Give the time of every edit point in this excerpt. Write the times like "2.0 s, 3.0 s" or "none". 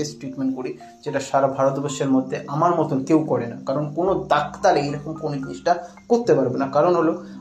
none